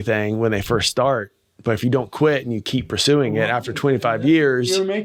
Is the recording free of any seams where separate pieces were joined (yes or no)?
yes